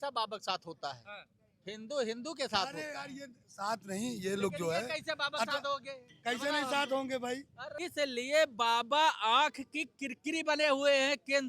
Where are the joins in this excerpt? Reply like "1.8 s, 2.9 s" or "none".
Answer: 7.8 s